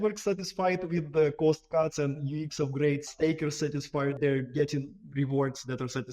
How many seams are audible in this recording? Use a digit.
2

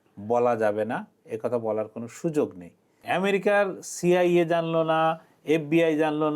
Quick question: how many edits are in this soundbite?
1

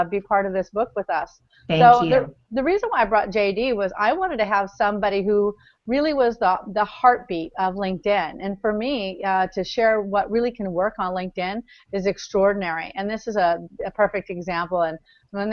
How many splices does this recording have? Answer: 1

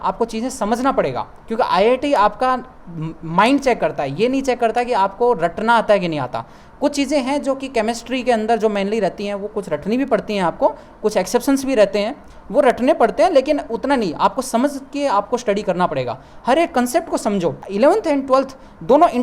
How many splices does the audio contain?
0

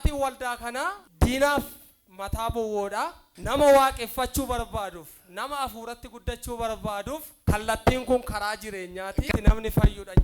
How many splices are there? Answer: 4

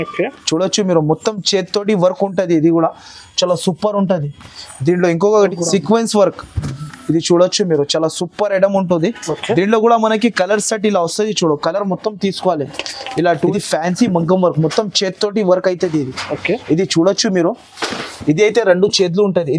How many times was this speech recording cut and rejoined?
2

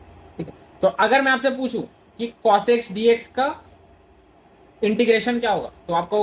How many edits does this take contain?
0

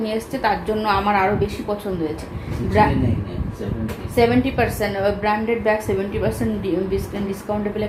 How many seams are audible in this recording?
0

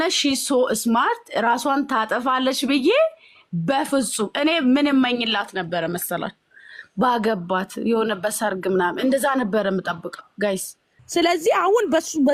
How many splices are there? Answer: 0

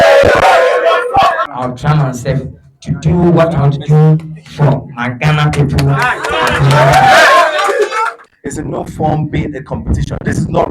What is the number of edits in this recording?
2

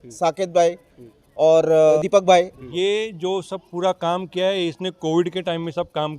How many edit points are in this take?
2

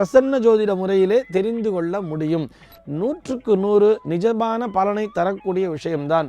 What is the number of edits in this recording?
1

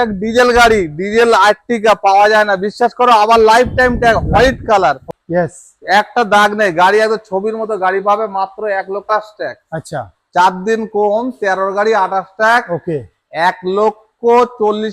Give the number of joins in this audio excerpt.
2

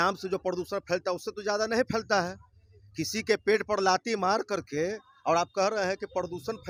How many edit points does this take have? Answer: 0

